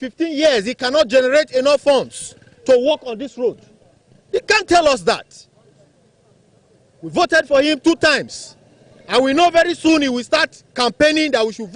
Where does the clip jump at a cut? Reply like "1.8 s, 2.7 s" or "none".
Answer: none